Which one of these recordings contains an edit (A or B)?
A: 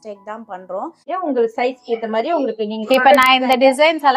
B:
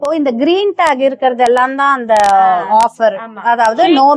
A